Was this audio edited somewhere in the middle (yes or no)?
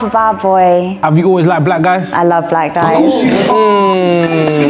no